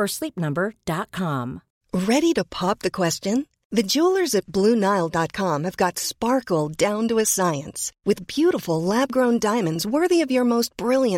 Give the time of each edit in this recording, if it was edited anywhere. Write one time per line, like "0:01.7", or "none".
0:01.7